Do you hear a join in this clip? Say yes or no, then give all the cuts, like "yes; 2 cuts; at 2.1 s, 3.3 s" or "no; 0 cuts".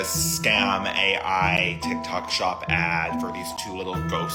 no; 0 cuts